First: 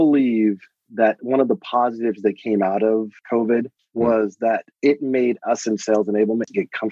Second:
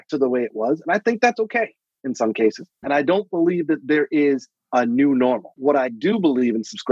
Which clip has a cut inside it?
second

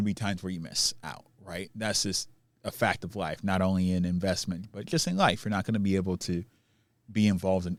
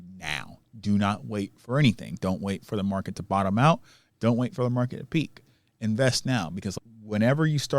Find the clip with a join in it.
second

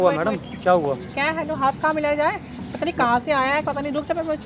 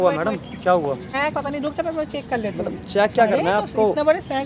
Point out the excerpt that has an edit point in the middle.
second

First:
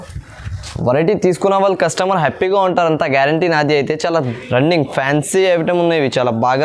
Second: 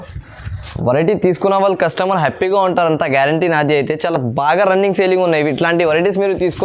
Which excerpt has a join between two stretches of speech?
first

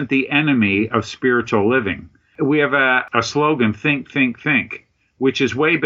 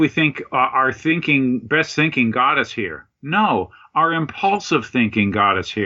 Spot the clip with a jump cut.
first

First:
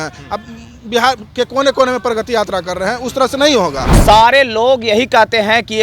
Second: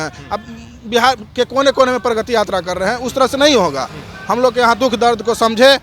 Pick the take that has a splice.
first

